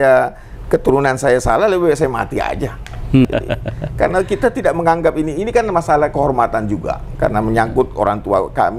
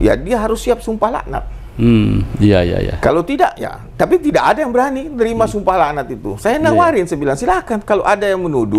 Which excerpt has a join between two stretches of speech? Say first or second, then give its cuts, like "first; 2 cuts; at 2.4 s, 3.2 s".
first; 1 cut; at 3.2 s